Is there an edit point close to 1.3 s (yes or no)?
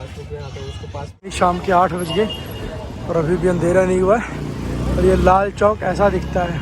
yes